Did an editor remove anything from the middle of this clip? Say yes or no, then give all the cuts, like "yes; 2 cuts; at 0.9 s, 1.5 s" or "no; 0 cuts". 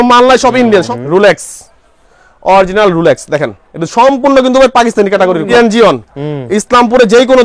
yes; 2 cuts; at 0.9 s, 5.5 s